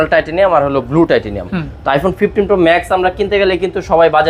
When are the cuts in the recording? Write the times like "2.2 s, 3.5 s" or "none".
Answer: none